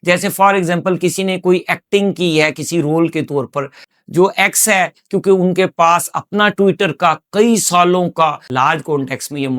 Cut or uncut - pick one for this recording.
cut